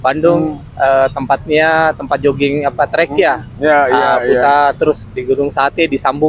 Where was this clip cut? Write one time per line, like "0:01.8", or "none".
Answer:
none